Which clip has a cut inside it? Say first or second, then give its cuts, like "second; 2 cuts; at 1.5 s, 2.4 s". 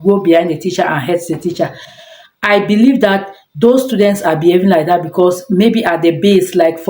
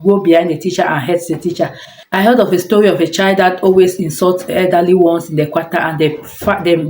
second; 1 cut; at 2.1 s